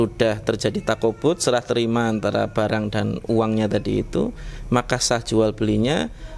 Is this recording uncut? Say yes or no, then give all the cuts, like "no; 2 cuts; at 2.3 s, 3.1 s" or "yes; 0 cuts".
yes; 0 cuts